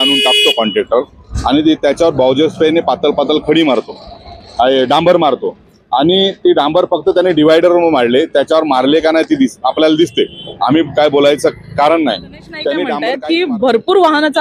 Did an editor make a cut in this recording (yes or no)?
yes